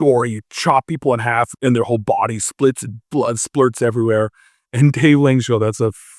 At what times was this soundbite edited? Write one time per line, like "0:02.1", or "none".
0:01.5